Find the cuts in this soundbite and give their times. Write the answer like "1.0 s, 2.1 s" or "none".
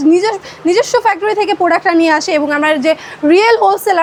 none